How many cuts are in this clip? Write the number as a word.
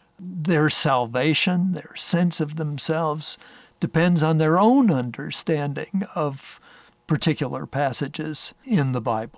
one